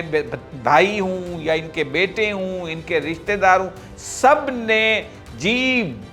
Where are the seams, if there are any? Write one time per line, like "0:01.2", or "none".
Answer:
none